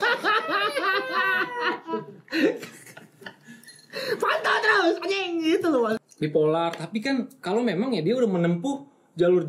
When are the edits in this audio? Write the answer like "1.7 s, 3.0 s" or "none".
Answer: 5.9 s

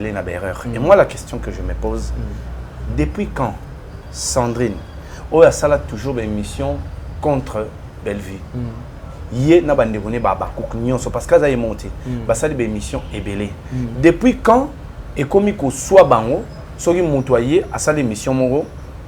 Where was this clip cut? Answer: none

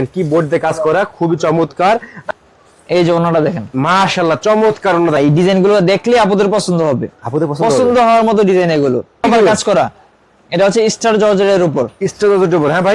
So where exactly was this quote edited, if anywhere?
2.2 s, 5.2 s, 9.2 s

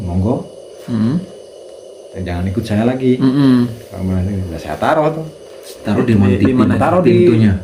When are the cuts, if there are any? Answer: none

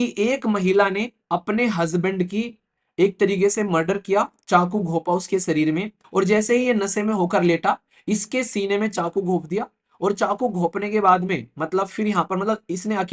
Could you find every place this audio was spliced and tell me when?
6.0 s

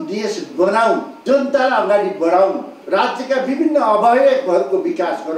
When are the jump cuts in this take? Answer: 1.1 s, 2.7 s

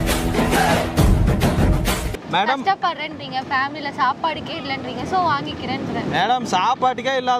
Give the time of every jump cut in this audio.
2.2 s

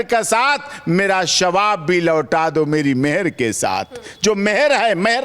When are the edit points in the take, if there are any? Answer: none

